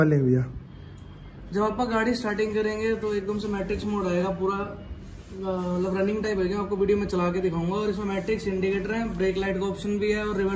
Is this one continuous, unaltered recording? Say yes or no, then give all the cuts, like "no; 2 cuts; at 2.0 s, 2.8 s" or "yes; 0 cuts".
yes; 0 cuts